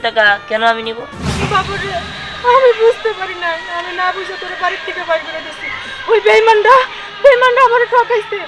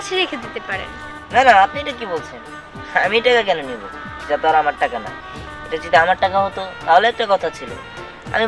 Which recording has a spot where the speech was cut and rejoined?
first; 1 cut; at 1.2 s

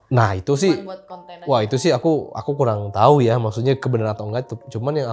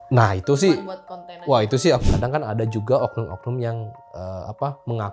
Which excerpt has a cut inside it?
second; 1 cut; at 2.0 s

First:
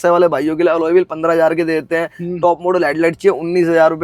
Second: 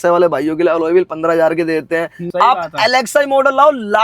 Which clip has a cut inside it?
second; 1 cut; at 2.2 s

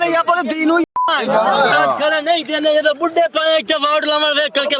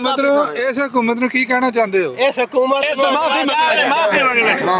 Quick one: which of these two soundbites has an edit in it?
first; 1 cut; at 1.7 s

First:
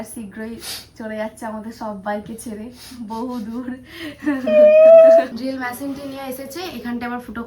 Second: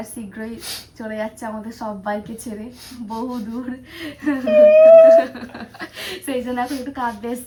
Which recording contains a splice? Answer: first; 1 cut; at 5.3 s

